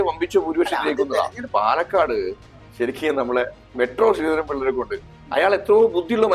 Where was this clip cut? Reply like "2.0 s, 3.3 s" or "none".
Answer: 1.4 s